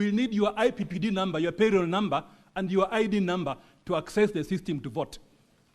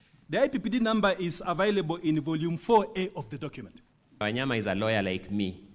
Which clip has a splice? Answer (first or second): second